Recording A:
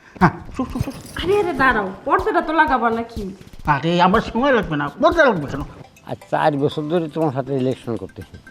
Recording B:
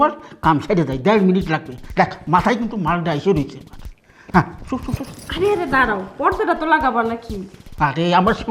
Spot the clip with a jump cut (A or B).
A